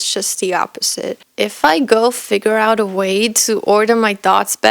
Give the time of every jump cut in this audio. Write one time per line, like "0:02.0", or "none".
0:01.3